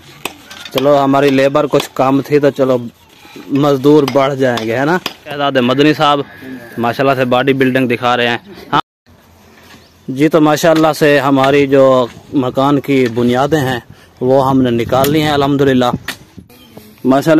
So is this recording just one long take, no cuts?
no; 3 cuts; at 5.4 s, 8.8 s, 16.3 s

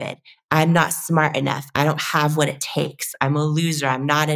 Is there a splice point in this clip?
no; 0 cuts

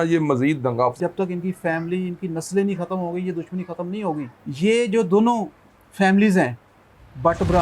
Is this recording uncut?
no; 2 cuts; at 1.0 s, 4.4 s

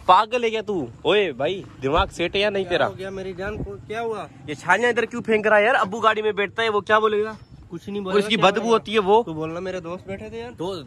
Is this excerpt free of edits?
yes; 0 cuts

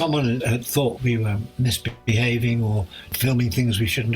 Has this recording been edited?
yes; 1 cut; at 3.1 s

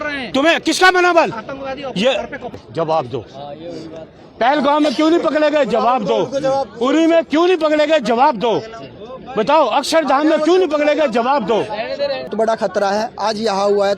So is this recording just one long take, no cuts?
no; 2 cuts; at 2.6 s, 12.3 s

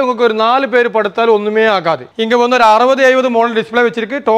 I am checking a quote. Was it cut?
yes; 1 cut; at 2.1 s

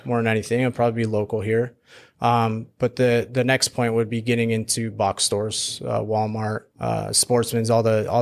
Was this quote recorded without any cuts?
no; 1 cut; at 6.7 s

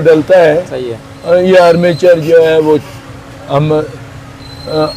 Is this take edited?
no; 0 cuts

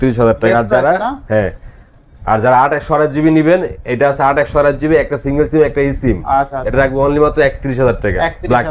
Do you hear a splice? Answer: no; 0 cuts

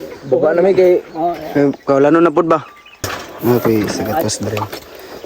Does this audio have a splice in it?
yes; 1 cut; at 3.2 s

